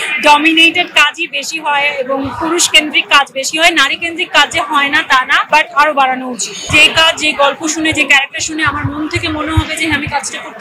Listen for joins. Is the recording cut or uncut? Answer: cut